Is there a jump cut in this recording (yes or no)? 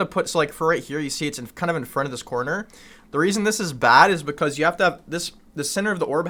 no